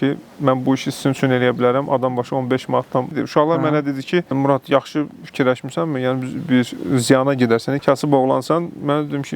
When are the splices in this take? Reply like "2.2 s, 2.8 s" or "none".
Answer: 4.3 s, 7.8 s